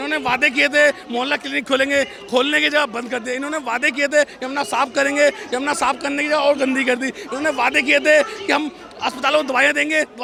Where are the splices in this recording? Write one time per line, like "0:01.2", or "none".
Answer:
none